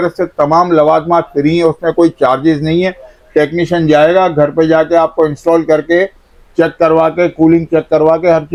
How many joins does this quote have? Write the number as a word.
zero